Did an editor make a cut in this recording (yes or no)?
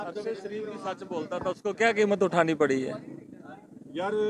no